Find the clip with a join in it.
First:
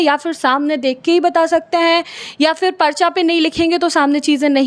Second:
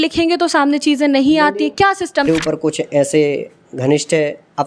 second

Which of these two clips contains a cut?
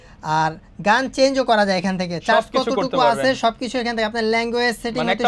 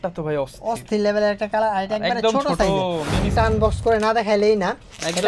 second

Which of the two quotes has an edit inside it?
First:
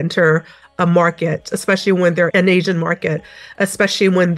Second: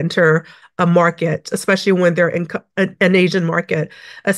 first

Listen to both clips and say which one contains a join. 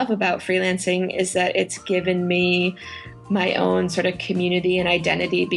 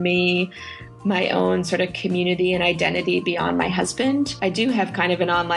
second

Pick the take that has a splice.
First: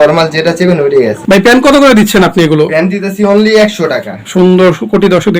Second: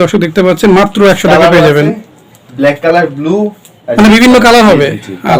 first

